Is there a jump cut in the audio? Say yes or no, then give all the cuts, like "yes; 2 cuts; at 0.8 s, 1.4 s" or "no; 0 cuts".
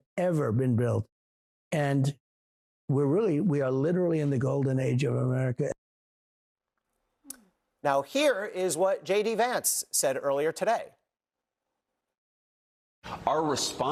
no; 0 cuts